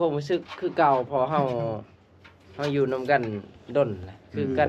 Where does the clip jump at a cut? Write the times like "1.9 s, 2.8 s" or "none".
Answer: none